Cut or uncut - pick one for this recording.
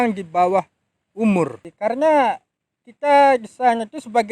cut